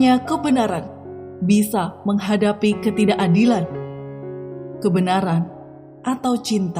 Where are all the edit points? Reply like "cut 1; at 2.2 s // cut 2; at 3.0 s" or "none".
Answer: none